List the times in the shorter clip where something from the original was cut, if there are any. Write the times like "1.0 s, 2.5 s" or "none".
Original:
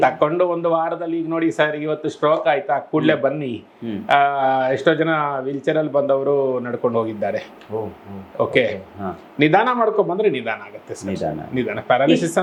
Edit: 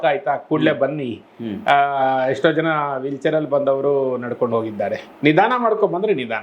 5.1 s